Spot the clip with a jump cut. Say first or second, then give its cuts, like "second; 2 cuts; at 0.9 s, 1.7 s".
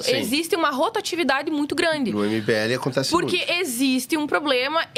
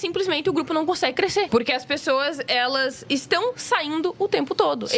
second; 2 cuts; at 1.5 s, 3.0 s